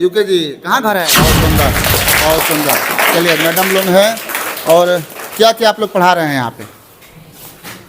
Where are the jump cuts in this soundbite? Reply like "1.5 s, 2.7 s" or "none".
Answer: 1.4 s